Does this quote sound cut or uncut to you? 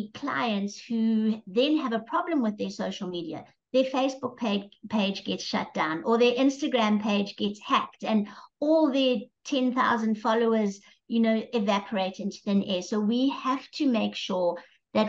uncut